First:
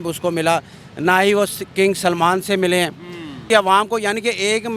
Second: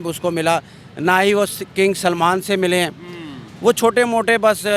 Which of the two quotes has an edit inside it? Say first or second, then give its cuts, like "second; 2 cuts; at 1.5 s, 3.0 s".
first; 1 cut; at 3.4 s